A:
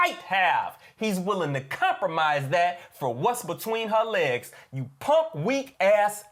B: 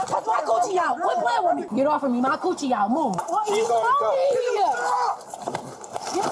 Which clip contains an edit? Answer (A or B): B